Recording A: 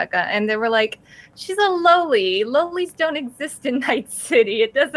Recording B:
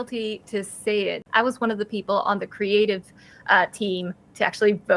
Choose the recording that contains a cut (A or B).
B